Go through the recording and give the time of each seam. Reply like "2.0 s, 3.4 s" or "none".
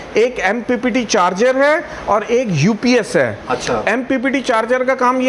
none